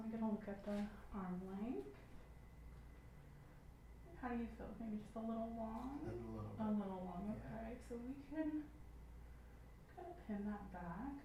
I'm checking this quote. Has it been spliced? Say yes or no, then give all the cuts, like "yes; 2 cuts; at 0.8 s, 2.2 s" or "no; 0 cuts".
no; 0 cuts